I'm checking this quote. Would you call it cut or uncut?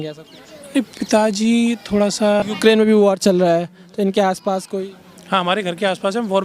cut